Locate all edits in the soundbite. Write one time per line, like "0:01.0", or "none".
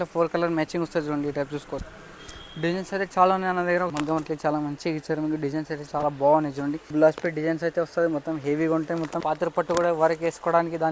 0:03.9
0:06.9
0:09.2